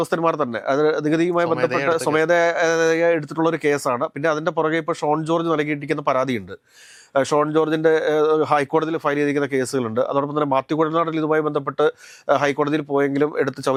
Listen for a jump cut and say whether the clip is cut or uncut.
uncut